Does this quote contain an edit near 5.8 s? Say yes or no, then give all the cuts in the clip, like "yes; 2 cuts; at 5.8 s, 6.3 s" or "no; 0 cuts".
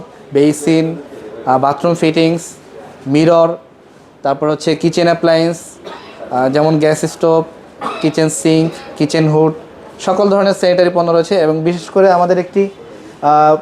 no; 0 cuts